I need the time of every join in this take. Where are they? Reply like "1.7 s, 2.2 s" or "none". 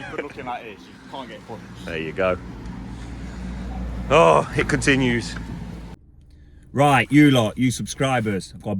5.9 s